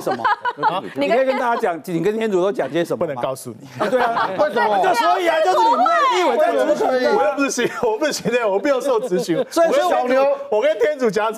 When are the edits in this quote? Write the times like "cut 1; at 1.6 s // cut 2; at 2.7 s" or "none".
none